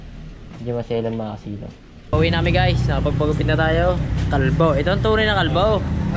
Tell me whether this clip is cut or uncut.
cut